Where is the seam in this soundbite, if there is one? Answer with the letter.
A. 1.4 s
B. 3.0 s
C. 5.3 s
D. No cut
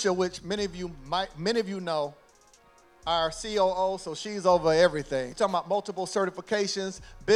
C